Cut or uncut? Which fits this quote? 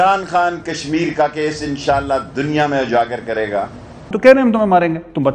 cut